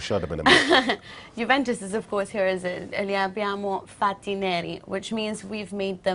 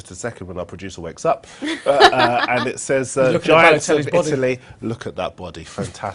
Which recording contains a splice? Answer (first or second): second